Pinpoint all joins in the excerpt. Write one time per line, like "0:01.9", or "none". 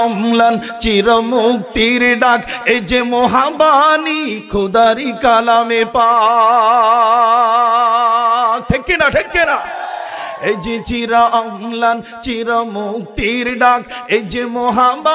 none